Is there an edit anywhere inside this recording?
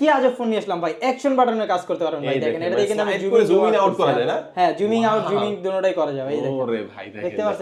no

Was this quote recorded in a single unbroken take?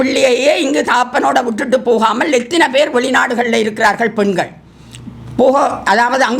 yes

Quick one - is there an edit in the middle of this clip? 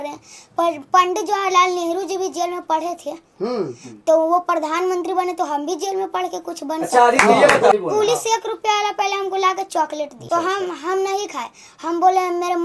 yes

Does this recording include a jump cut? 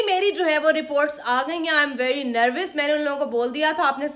no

